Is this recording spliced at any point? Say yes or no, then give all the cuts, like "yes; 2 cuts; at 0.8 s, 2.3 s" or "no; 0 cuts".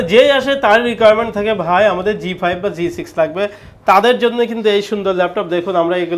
no; 0 cuts